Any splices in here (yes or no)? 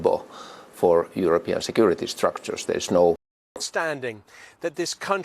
yes